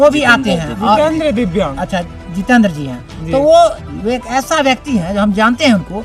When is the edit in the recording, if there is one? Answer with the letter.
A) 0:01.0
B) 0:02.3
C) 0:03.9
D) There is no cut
C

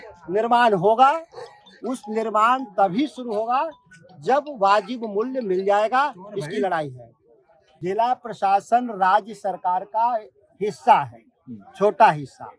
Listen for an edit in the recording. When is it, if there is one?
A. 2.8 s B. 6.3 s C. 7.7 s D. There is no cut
C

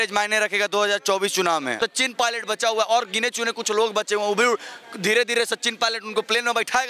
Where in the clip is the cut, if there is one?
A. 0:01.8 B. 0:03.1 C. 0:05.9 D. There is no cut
A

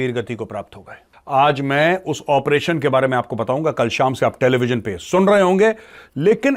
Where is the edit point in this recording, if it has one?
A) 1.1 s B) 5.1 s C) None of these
A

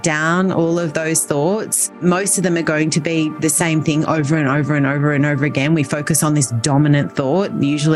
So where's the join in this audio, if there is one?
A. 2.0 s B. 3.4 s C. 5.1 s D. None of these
A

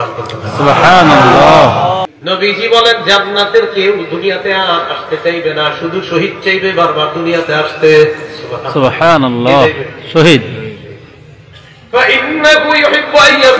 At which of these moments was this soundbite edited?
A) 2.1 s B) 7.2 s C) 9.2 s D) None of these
A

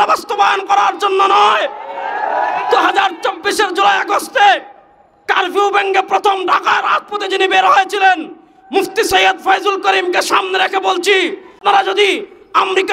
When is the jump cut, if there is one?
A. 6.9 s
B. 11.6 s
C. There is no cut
B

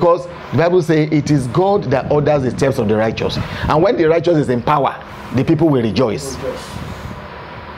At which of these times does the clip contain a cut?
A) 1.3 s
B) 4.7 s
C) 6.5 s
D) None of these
D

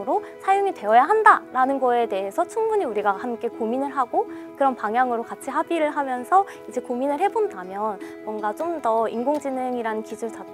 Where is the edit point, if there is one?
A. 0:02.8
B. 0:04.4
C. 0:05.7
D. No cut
B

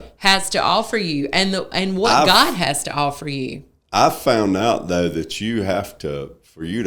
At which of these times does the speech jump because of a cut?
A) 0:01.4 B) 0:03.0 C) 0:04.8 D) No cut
D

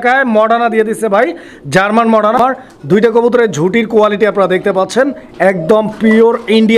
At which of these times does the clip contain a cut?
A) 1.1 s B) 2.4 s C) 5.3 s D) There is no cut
B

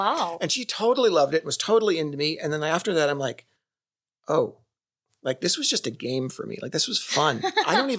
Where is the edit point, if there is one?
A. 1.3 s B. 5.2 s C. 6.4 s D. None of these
D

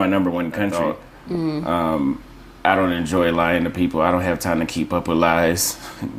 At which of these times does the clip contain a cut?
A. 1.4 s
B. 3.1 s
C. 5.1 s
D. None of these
A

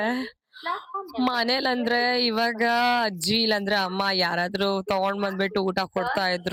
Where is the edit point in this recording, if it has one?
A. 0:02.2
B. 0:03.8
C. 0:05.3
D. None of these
D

